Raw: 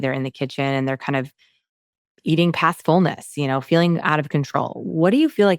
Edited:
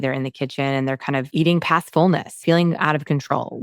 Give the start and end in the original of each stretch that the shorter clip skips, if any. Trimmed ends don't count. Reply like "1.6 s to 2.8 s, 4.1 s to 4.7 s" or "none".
1.3 s to 2.2 s, 3.3 s to 3.6 s